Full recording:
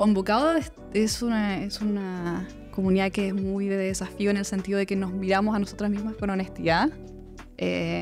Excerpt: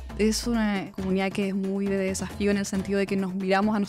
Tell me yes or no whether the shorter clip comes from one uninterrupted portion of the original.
no